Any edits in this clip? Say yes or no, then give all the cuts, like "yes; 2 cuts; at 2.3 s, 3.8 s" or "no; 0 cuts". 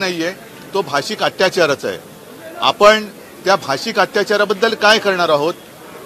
no; 0 cuts